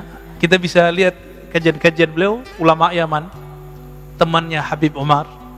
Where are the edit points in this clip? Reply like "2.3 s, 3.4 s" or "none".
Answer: none